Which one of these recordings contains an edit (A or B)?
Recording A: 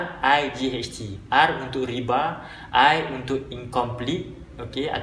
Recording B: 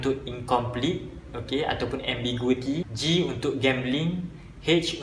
B